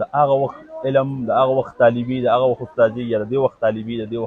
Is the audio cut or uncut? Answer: uncut